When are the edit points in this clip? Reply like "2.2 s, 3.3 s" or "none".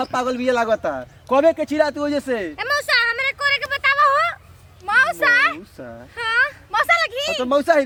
none